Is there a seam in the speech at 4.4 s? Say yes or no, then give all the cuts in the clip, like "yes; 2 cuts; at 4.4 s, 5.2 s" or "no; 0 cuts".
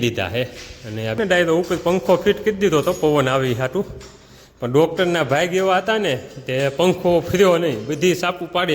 no; 1 cut; at 1.2 s